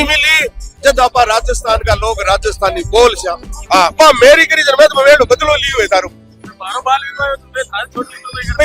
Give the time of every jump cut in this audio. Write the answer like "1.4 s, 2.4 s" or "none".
3.5 s